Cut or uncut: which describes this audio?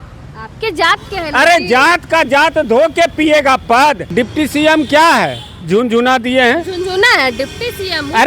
cut